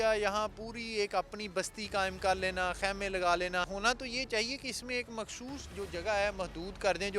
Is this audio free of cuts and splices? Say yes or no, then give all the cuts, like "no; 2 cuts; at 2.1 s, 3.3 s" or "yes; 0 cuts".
no; 1 cut; at 3.7 s